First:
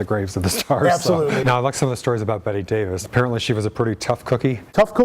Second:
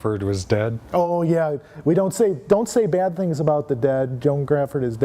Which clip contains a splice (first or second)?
first